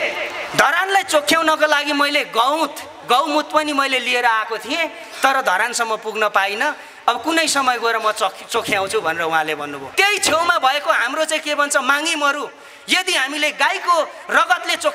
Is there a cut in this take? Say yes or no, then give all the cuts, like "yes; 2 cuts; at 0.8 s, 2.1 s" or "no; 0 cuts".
yes; 1 cut; at 9.8 s